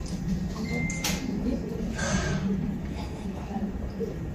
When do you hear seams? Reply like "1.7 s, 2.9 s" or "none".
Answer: none